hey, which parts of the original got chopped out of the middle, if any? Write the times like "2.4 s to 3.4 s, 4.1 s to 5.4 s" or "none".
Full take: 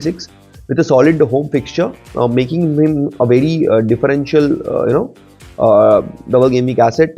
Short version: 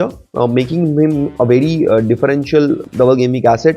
4.6 s to 6.2 s